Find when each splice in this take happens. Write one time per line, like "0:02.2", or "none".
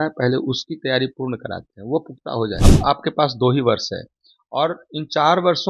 0:02.6